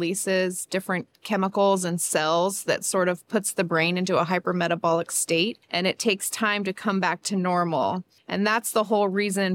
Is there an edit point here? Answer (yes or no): yes